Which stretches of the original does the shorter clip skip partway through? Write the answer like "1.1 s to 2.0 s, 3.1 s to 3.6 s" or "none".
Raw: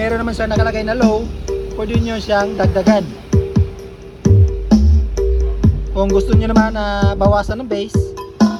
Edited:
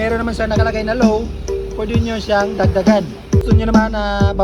3.4 s to 6.3 s